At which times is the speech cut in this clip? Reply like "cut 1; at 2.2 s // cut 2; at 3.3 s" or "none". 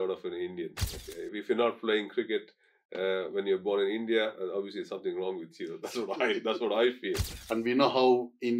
cut 1; at 7.3 s